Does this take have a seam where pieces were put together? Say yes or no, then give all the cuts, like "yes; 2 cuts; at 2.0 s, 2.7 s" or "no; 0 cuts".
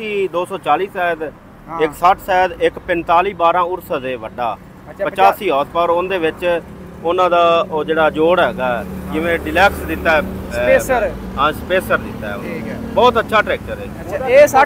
no; 0 cuts